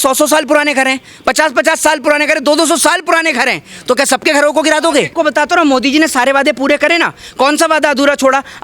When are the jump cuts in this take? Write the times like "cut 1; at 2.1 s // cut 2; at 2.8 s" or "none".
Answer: cut 1; at 5.1 s